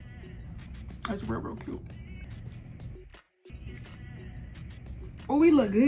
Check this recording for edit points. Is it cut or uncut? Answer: cut